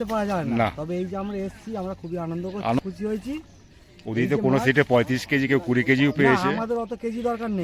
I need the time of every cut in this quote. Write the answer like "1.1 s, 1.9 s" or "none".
2.8 s